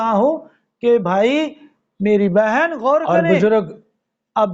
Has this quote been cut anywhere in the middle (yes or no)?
yes